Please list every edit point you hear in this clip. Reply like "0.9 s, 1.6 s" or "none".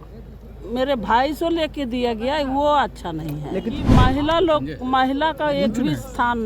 3.9 s

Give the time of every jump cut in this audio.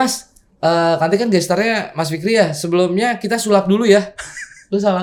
none

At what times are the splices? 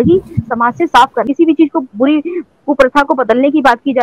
1.2 s

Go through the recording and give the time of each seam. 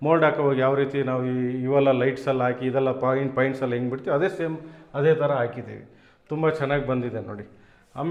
none

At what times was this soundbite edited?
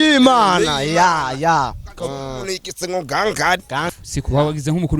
3.9 s

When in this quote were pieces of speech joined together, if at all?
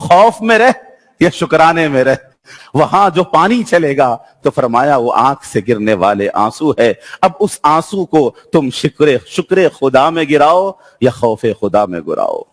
2.5 s

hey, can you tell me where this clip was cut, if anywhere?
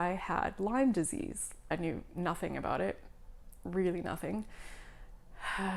1.7 s

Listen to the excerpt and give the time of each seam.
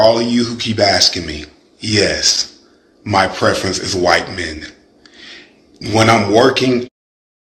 none

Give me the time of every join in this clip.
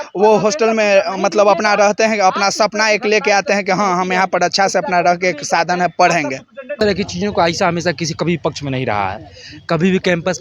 6.8 s

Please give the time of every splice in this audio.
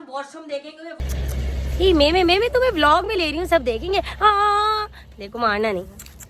0.9 s

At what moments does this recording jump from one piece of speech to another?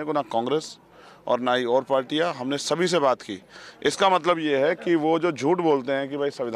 none

